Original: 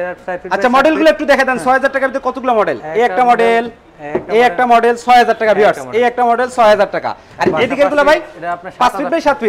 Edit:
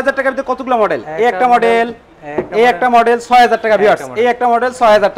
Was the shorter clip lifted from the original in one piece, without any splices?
yes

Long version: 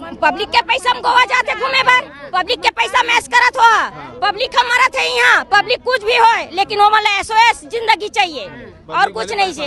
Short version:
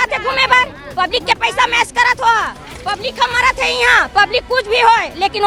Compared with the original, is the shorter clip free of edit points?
yes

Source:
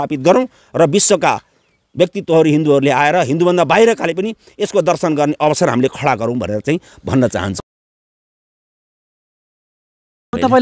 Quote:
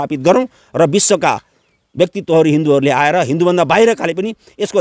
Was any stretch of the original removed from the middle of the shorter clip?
no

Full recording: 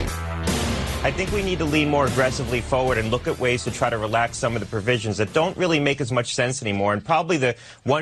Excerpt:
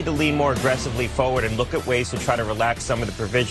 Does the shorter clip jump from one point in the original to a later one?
no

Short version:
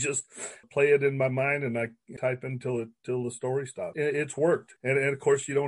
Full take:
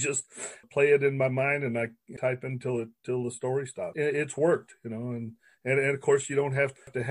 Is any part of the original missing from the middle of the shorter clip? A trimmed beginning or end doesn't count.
yes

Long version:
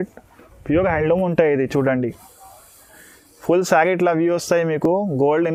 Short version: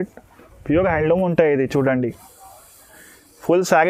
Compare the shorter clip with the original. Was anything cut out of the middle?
no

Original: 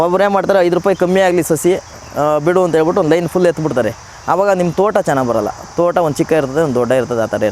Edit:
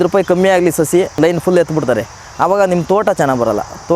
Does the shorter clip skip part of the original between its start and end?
yes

